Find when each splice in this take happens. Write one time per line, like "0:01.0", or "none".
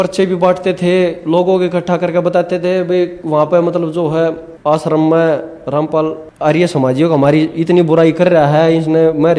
0:04.5
0:06.2